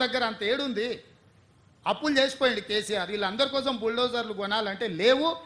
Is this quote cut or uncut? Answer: uncut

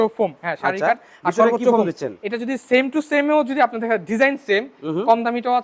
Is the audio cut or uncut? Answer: uncut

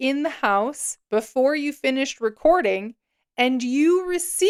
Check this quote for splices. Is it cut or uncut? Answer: uncut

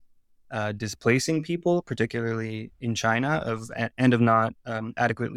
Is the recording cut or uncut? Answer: uncut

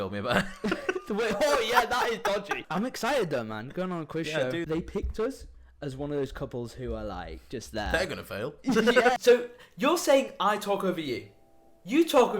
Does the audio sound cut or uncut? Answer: cut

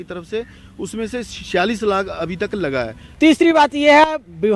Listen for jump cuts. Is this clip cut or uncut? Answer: cut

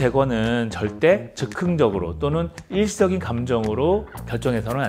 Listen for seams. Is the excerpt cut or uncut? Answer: uncut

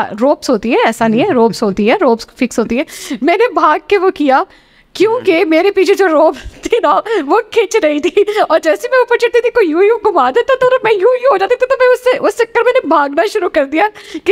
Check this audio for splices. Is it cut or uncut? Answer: uncut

